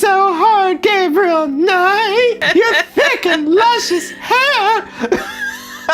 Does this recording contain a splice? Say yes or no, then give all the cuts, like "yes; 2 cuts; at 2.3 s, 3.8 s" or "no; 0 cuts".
yes; 1 cut; at 2.4 s